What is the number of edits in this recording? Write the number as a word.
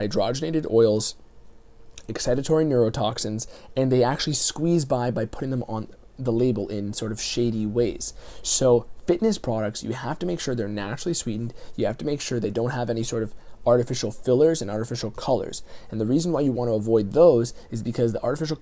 zero